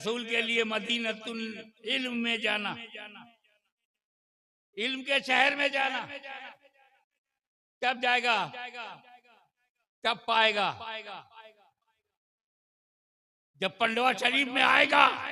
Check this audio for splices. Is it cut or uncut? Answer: uncut